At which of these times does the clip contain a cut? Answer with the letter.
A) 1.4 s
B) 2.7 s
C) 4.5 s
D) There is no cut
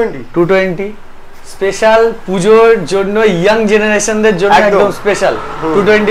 D